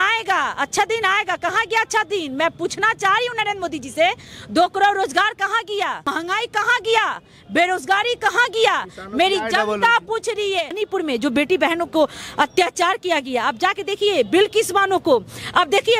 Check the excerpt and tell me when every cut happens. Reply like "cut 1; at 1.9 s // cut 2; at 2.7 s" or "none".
cut 1; at 6.1 s // cut 2; at 10.8 s